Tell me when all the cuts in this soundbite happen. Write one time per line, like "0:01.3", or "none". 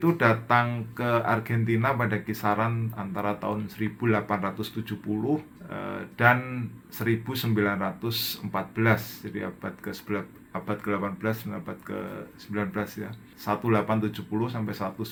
none